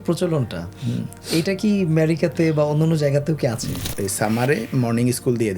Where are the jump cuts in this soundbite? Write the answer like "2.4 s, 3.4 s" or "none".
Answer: 3.8 s

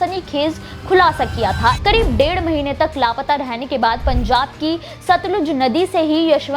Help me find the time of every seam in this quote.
1.8 s

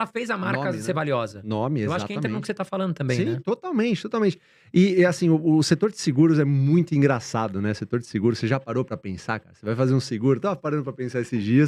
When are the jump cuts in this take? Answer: none

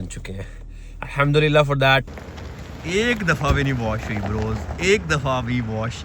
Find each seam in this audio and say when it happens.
2.1 s

